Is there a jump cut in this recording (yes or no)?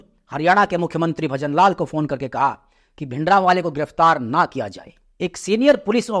no